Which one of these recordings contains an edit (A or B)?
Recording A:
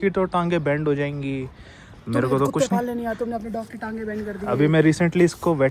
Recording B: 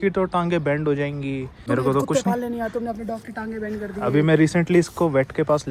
B